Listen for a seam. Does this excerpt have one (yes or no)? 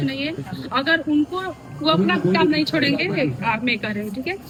no